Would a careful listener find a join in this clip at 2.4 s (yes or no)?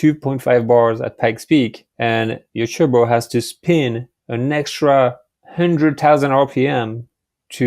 yes